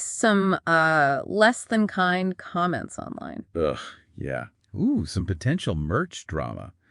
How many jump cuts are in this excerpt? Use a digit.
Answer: 1